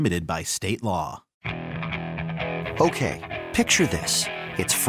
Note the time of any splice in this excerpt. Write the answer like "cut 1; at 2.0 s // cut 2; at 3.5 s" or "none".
cut 1; at 1.3 s